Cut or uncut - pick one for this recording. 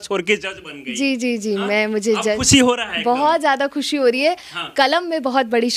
uncut